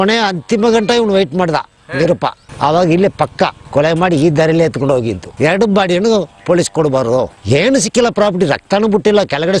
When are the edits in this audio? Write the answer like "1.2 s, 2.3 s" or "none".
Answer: 2.5 s, 5.2 s